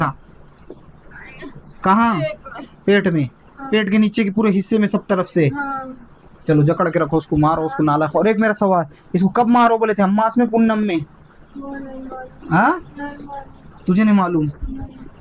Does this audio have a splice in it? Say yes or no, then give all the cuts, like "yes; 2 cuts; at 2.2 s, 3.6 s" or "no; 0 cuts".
no; 0 cuts